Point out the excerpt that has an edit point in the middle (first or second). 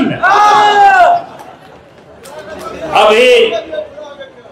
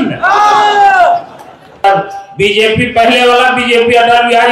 second